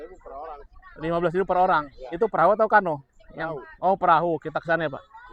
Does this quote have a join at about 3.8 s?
no; 0 cuts

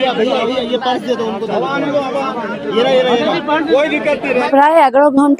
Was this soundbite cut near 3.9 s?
yes; 1 cut; at 3.9 s

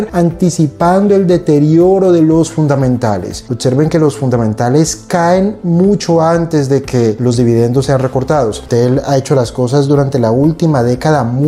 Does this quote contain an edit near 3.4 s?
yes; 2 cuts; at 3.4 s, 8.6 s

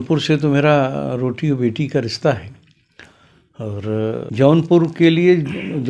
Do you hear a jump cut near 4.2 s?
yes; 1 cut; at 4.2 s

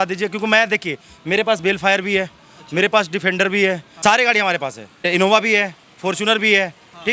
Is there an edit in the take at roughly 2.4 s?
no; 2 cuts; at 3.9 s, 5.0 s

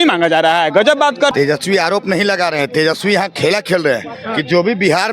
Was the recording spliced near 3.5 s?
no; 1 cut; at 1.3 s

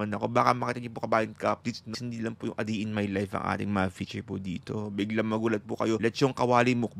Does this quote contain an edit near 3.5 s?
no; 2 cuts; at 2.0 s, 6.0 s

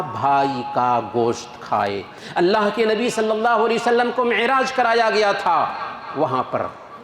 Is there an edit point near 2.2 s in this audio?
yes; 1 cut; at 2.2 s

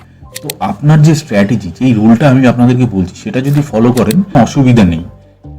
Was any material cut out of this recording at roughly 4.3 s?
yes; 1 cut; at 4.3 s

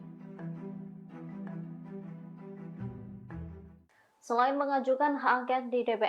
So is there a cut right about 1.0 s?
no; 1 cut; at 3.8 s

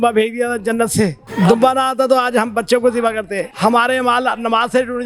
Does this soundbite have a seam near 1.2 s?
yes; 2 cuts; at 1.2 s, 3.4 s

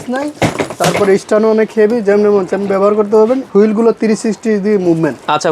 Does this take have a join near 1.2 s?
no; 1 cut; at 3.5 s

